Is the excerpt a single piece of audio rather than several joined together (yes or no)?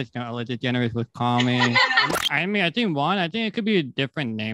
no